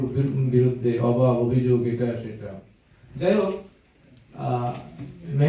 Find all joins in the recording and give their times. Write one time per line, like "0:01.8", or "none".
none